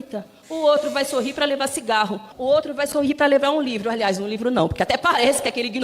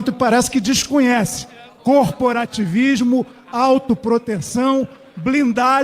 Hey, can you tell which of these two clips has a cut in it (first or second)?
first